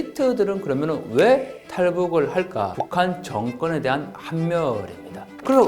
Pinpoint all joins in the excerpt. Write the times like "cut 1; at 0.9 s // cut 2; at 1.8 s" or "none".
cut 1; at 2.7 s